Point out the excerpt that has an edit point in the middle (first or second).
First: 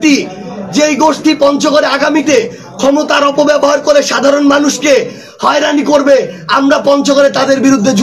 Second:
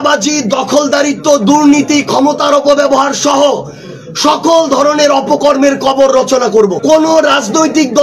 second